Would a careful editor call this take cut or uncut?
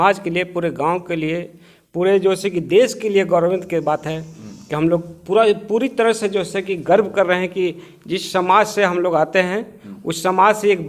uncut